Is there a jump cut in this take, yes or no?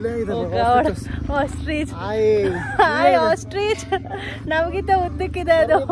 no